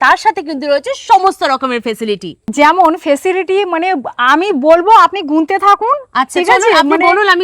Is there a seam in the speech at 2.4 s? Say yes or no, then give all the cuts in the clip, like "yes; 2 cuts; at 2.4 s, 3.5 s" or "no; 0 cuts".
yes; 1 cut; at 2.4 s